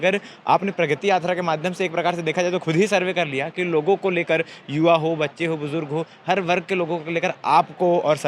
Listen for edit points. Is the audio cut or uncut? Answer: uncut